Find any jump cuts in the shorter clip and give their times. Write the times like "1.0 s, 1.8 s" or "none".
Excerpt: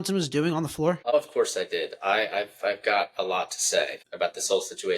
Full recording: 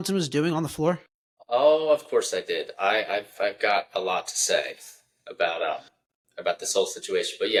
1.1 s, 4.0 s

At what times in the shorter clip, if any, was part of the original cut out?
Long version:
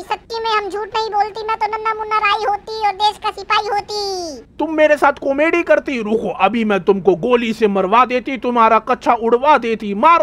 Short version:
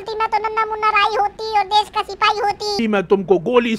2.8 s

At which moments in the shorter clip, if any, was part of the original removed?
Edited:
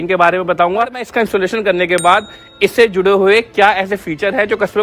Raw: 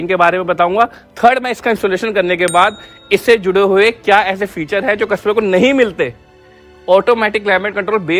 1.0 s

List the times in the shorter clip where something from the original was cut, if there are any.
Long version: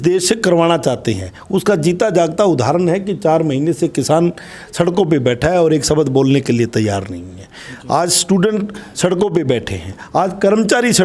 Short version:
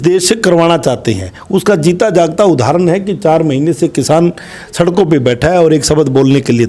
none

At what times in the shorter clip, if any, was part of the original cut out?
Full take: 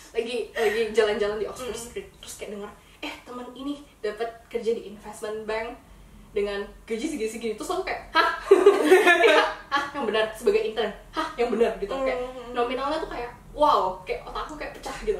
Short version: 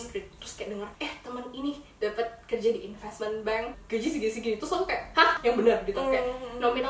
0.9 s, 3.8 s, 5.4 s

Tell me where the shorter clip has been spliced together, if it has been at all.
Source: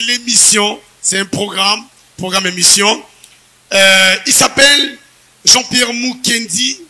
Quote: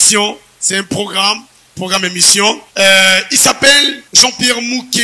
2.7 s, 4.0 s

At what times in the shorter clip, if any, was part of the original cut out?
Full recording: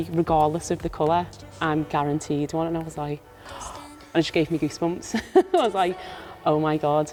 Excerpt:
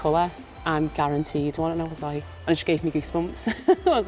2.3 s

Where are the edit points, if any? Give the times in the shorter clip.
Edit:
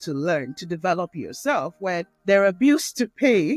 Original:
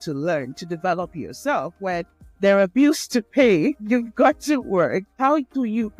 2.1 s

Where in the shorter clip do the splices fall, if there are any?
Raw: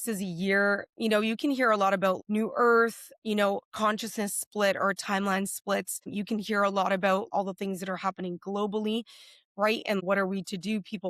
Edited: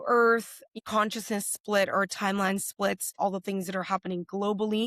0.8 s, 3.1 s

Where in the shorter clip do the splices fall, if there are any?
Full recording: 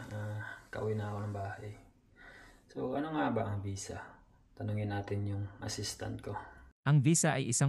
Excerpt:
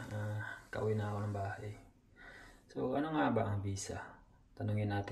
none

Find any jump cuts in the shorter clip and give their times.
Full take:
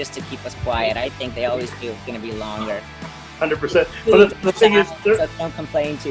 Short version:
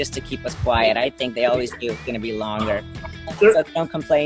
3.3 s

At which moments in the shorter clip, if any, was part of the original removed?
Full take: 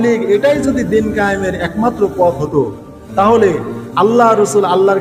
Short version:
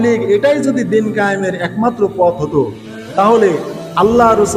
none

